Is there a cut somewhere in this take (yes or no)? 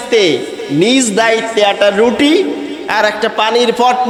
no